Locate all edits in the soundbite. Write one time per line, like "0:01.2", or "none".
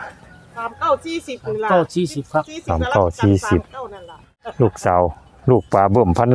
0:04.5